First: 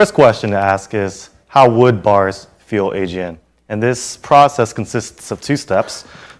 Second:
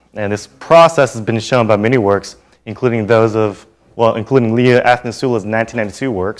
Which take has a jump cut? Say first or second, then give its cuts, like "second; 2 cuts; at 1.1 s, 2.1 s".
first; 1 cut; at 4.8 s